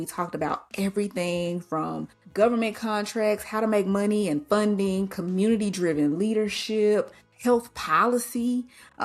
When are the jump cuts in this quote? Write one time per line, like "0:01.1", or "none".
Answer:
0:02.2
0:07.2